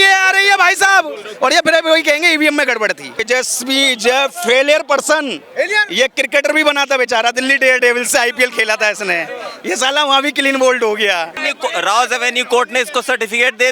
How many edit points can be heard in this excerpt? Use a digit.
2